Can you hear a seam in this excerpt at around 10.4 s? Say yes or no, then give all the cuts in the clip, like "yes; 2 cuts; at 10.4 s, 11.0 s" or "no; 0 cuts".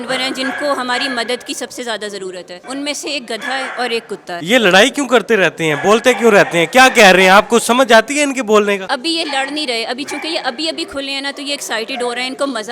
no; 3 cuts; at 2.6 s, 4.3 s, 8.8 s